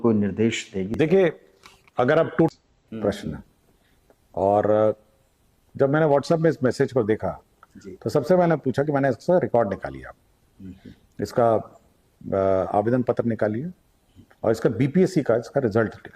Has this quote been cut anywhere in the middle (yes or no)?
yes